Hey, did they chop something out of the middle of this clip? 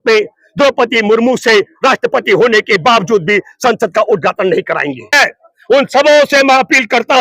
yes; 1 cut; at 5.2 s

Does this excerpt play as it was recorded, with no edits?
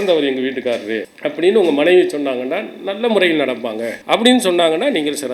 no; 2 cuts; at 1.1 s, 3.9 s

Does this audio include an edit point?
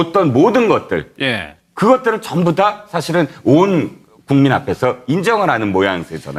no; 0 cuts

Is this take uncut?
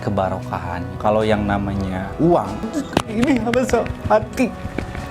no; 2 cuts; at 0.9 s, 2.6 s

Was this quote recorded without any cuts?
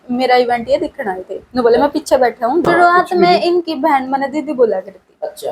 no; 1 cut; at 2.6 s

